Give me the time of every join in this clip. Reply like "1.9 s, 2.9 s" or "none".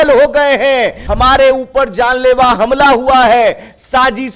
1.0 s